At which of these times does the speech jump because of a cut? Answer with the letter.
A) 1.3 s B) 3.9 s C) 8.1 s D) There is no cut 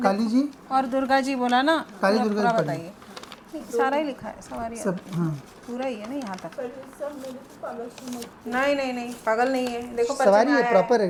D